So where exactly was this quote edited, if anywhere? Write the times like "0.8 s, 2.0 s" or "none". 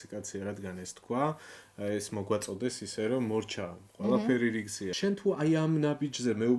4.8 s